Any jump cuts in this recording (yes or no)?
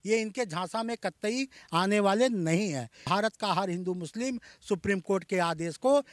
yes